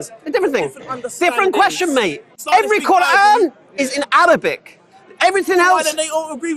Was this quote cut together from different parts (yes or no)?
yes